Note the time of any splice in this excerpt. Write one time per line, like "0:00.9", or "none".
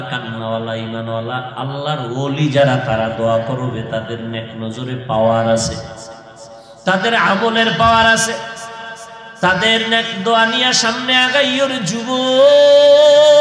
none